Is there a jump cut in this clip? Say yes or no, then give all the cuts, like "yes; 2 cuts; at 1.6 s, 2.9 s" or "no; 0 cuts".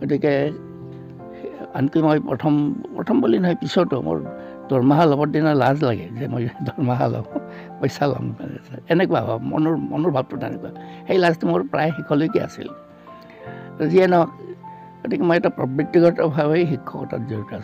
no; 0 cuts